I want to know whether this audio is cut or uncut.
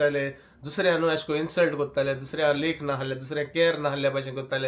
uncut